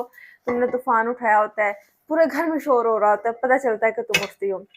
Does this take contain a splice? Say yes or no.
no